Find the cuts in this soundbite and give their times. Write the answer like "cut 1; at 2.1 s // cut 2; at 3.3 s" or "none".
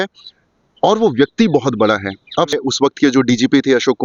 cut 1; at 2.5 s